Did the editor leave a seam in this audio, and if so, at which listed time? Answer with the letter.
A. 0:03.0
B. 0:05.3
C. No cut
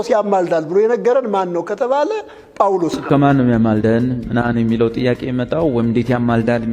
A